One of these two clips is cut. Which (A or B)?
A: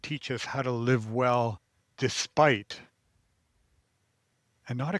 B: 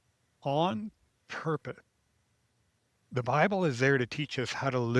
B